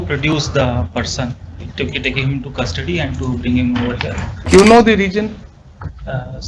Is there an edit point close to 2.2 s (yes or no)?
no